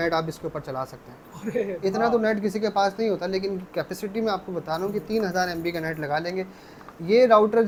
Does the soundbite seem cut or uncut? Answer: uncut